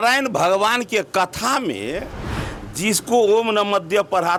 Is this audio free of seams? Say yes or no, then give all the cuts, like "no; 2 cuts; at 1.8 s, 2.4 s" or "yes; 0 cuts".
yes; 0 cuts